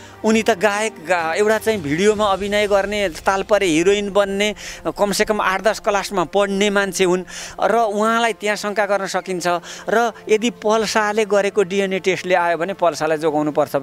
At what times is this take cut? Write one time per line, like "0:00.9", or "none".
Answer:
none